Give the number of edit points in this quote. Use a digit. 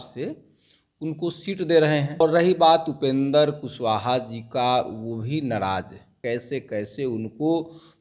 2